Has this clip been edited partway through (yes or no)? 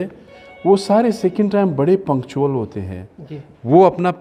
no